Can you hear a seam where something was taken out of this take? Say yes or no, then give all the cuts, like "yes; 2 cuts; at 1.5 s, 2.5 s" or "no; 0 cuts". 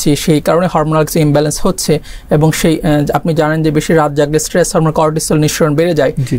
no; 0 cuts